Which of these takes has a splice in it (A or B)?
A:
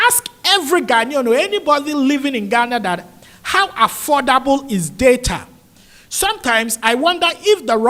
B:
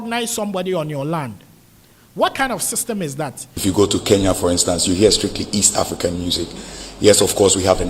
B